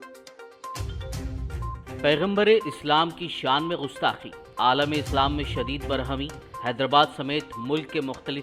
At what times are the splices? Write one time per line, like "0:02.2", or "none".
0:01.0